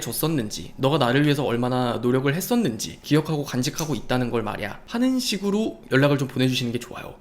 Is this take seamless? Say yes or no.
no